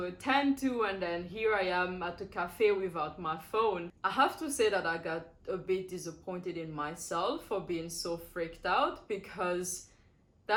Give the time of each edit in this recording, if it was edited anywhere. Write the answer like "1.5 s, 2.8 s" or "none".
none